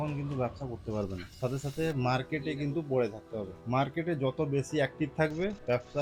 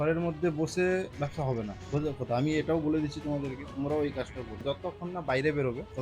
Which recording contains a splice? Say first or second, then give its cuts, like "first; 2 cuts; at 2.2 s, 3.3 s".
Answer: second; 2 cuts; at 1.2 s, 4.6 s